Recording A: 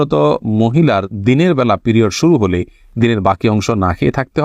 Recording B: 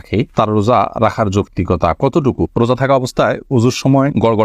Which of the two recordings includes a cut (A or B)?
B